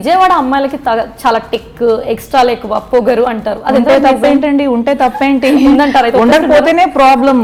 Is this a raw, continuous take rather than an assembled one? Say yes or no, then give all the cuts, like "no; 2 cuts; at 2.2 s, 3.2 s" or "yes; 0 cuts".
yes; 0 cuts